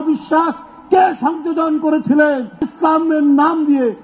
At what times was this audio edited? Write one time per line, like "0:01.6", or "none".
0:02.7